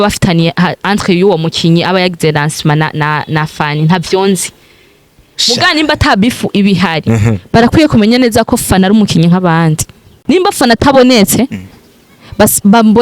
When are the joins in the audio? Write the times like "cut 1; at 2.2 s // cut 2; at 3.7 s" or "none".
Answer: cut 1; at 10.2 s